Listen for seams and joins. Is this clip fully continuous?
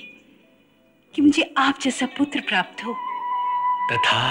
no; 1 cut; at 3.1 s

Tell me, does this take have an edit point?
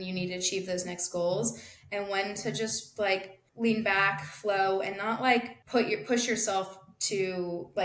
yes; 2 cuts; at 3.4 s, 5.6 s

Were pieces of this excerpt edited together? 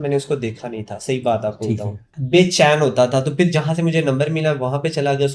yes; 1 cut; at 2.1 s

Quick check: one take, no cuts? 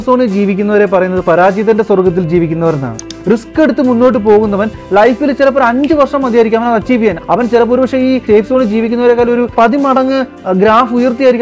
no; 3 cuts; at 3.1 s, 7.2 s, 8.2 s

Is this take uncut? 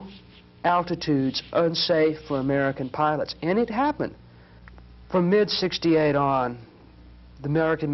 no; 1 cut; at 4.6 s

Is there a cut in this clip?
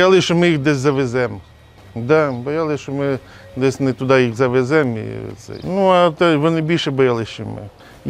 no; 0 cuts

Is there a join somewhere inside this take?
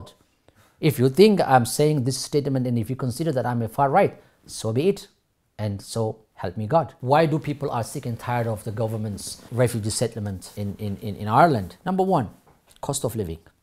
yes; 4 cuts; at 7.0 s, 9.3 s, 10.4 s, 11.7 s

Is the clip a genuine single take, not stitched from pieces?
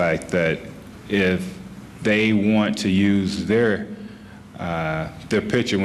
yes; 0 cuts

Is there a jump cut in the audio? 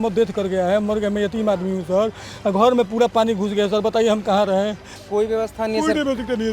yes; 1 cut; at 4.8 s

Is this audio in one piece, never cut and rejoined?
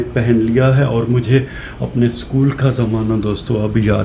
yes; 0 cuts

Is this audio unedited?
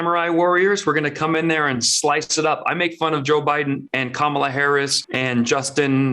no; 2 cuts; at 3.9 s, 5.0 s

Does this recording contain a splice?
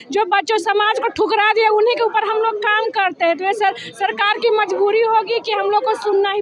no; 0 cuts

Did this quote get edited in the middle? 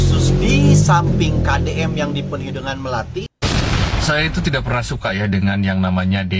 yes; 1 cut; at 3.3 s

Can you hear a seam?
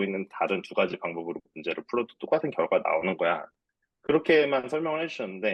no; 0 cuts

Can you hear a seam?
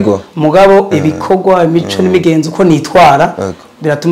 no; 0 cuts

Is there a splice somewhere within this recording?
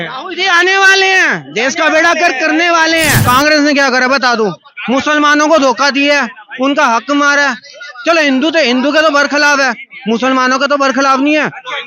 yes; 1 cut; at 3.2 s

